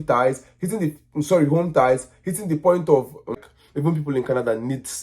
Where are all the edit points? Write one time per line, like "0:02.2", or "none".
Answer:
0:03.4